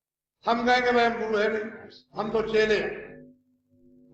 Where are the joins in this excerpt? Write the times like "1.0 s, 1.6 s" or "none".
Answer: none